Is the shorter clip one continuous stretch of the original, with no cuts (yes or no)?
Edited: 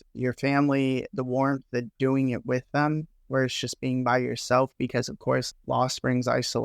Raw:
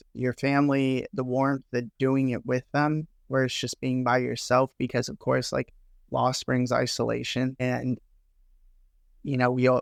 no